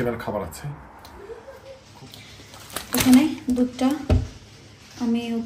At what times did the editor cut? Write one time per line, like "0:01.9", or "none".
0:01.6